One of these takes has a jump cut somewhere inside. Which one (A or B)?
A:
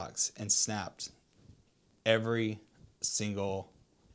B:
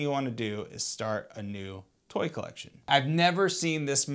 B